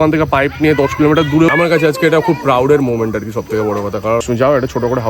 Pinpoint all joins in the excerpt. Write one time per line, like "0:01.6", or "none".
0:01.5
0:04.2

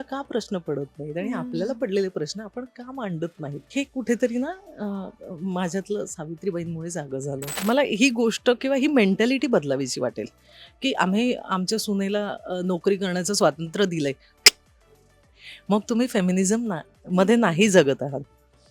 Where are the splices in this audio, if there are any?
0:03.6
0:07.5

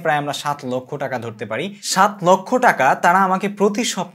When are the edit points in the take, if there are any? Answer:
0:01.8

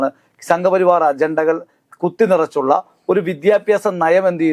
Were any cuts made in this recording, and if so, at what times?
none

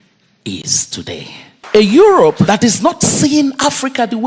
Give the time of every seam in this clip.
0:01.6
0:02.5

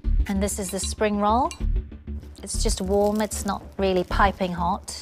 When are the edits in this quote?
none

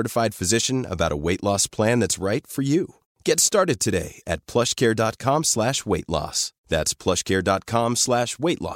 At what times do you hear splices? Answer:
none

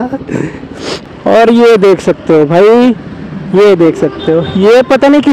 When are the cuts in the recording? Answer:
0:01.1

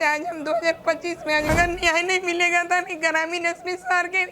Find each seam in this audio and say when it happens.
0:01.5

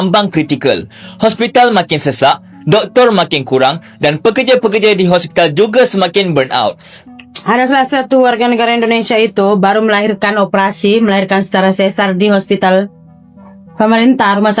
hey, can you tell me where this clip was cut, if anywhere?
0:06.9

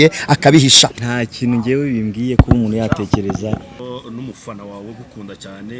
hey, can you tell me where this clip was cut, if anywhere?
0:00.9
0:03.8

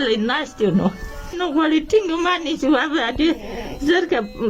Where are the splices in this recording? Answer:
0:01.3

